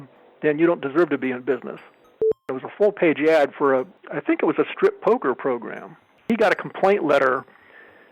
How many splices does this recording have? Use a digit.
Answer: 3